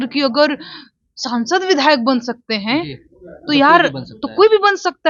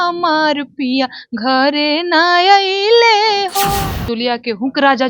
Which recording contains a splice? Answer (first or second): second